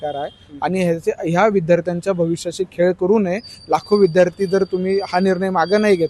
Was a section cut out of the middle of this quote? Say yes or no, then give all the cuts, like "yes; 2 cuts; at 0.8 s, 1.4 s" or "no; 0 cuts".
no; 0 cuts